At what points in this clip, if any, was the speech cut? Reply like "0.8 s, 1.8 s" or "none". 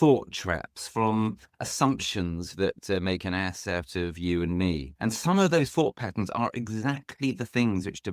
4.9 s